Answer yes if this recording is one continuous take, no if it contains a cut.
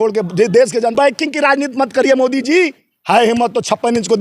no